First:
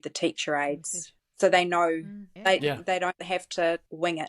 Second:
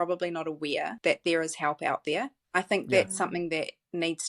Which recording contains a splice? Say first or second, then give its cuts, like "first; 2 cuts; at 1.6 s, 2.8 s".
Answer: second; 2 cuts; at 0.9 s, 2.4 s